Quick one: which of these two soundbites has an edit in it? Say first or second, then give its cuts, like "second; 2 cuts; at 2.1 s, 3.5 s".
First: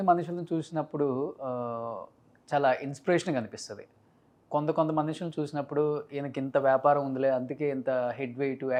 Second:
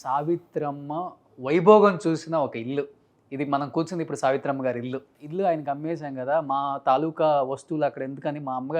second; 1 cut; at 5.1 s